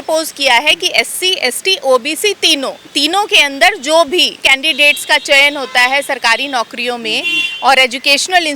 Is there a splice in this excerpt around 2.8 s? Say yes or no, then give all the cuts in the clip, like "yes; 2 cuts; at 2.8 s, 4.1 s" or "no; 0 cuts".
yes; 2 cuts; at 2.8 s, 4.5 s